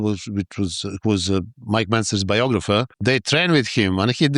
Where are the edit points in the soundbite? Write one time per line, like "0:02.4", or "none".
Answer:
0:02.9